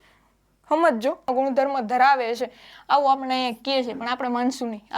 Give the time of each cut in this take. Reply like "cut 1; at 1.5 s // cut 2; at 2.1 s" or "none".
cut 1; at 1.3 s